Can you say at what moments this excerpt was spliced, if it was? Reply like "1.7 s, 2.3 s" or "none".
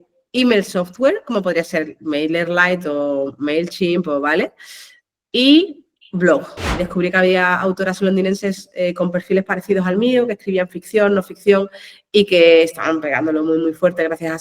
6.8 s